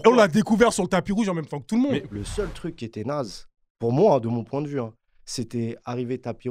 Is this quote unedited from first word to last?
no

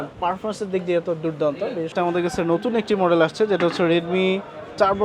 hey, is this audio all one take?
no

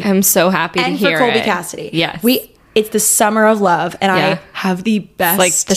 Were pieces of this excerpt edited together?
no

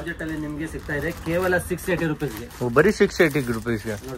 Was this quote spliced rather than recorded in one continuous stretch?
no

